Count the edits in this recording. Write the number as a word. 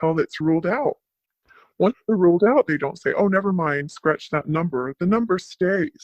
zero